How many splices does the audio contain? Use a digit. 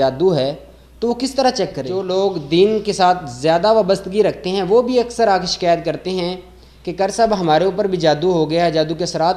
1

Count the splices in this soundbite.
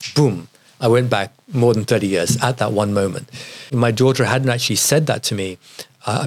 1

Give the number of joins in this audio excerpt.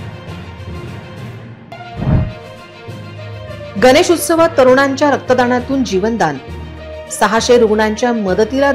1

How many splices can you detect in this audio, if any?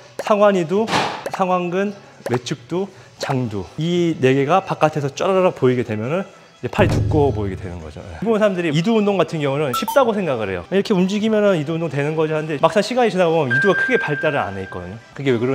2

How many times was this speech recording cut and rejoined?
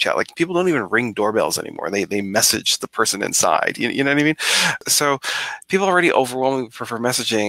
1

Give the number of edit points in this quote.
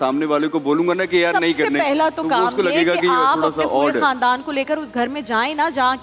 0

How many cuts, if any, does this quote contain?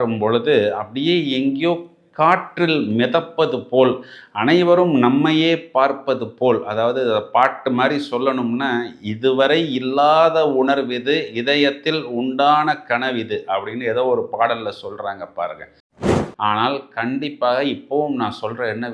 1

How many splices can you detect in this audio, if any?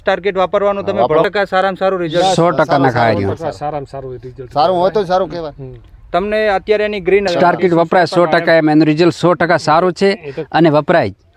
2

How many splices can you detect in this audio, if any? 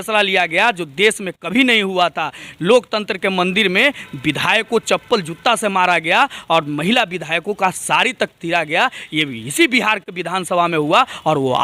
0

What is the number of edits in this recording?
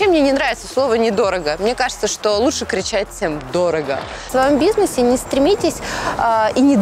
1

